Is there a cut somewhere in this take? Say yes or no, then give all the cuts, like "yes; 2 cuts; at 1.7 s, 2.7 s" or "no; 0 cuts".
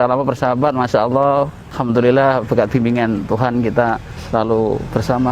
yes; 2 cuts; at 1.7 s, 4.1 s